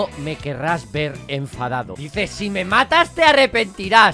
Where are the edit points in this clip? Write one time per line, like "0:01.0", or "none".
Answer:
0:02.0